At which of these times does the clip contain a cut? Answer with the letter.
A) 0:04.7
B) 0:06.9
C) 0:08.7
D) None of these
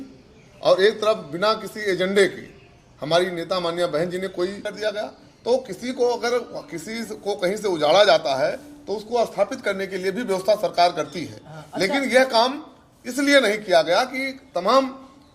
A